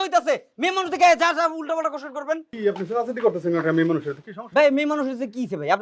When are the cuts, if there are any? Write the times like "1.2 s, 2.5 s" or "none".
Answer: 2.5 s

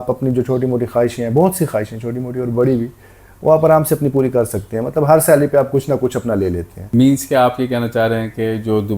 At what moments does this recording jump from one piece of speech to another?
6.7 s

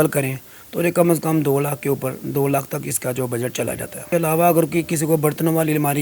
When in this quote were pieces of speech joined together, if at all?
4.0 s

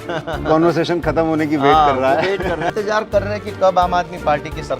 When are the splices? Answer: 2.7 s

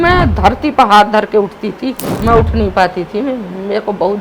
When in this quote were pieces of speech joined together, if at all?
2.1 s

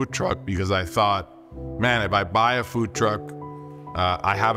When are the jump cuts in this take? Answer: none

